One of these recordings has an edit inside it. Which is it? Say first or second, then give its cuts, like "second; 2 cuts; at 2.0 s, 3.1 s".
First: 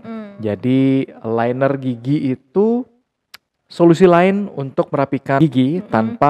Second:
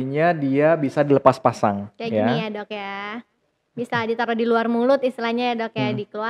first; 1 cut; at 5.4 s